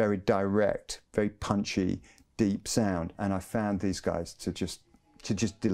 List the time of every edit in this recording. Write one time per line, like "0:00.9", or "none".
0:03.2